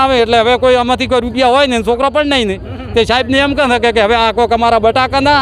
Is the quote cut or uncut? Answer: uncut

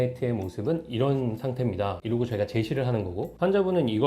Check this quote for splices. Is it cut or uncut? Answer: cut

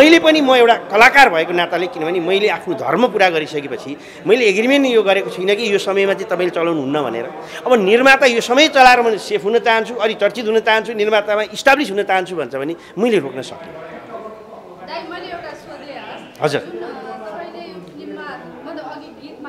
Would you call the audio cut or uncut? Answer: uncut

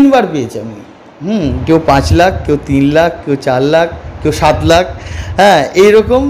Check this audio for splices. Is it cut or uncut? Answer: uncut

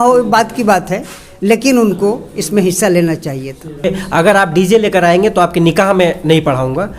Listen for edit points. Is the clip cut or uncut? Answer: cut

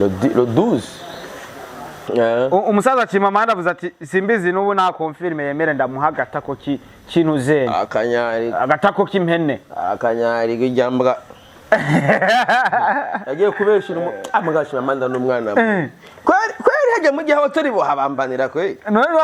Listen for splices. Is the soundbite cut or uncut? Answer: cut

